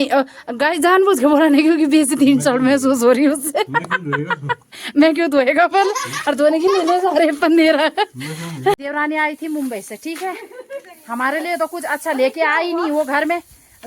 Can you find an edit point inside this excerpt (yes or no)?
yes